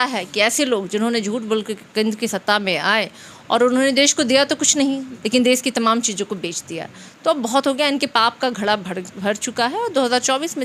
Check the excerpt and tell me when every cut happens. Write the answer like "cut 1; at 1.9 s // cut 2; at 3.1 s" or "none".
none